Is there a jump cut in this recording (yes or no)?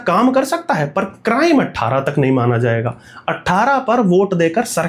no